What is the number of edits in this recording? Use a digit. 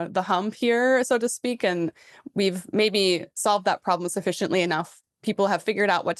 0